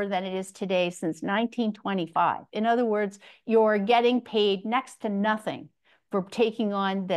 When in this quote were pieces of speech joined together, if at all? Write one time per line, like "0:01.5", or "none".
none